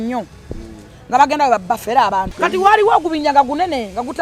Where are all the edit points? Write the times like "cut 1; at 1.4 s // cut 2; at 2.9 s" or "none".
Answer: cut 1; at 2.3 s